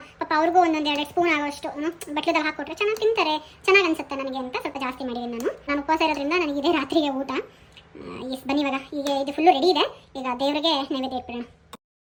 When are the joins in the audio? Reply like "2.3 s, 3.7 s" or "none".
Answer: none